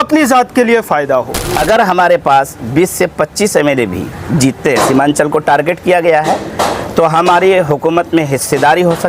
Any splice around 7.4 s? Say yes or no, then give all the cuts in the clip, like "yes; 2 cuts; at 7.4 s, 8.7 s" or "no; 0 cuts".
no; 1 cut; at 1.4 s